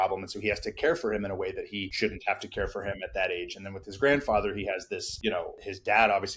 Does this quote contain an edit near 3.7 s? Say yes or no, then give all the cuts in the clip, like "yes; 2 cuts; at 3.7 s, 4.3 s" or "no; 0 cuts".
no; 2 cuts; at 1.9 s, 5.5 s